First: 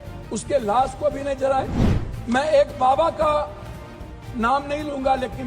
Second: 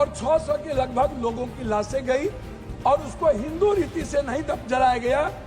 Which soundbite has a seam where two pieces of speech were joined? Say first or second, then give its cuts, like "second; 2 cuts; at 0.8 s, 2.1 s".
first; 1 cut; at 1.8 s